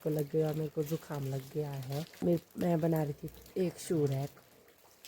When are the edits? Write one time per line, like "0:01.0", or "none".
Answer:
0:02.1